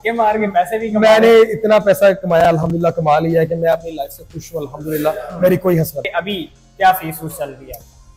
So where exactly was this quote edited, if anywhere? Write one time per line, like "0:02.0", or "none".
0:06.1